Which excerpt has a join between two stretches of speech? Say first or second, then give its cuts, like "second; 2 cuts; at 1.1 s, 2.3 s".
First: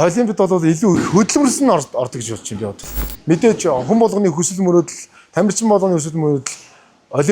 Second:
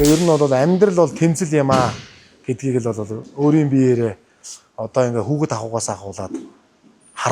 first; 1 cut; at 2.9 s